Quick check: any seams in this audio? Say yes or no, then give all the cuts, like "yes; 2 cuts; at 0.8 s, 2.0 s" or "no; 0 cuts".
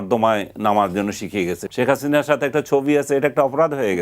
yes; 1 cut; at 1.6 s